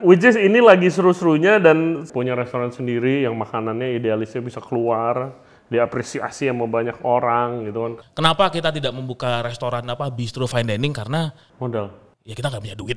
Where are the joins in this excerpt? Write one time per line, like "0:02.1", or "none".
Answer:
0:02.0
0:08.0